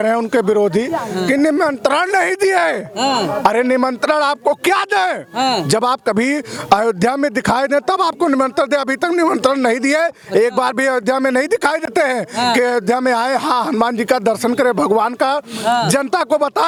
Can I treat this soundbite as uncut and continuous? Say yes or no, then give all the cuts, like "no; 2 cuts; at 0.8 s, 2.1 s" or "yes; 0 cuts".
yes; 0 cuts